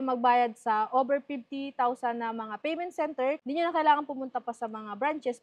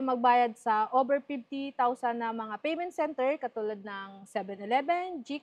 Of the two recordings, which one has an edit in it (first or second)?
first